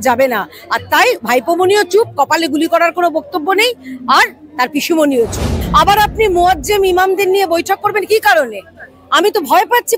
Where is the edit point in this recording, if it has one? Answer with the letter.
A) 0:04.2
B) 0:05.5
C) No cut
B